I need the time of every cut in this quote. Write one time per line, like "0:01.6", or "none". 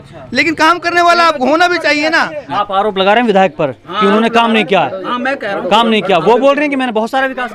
0:02.4